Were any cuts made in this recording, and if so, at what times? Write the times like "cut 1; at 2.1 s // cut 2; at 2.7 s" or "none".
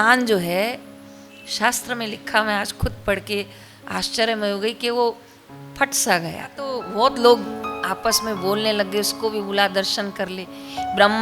cut 1; at 6.8 s